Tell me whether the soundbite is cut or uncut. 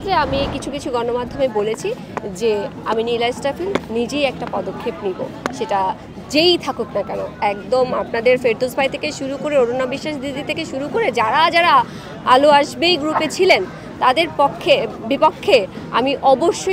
uncut